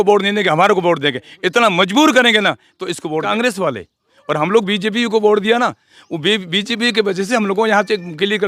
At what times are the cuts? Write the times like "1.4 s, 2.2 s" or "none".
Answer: 3.3 s